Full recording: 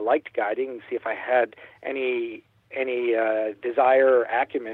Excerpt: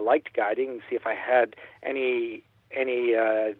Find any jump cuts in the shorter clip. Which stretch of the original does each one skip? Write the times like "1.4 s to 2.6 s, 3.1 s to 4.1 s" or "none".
none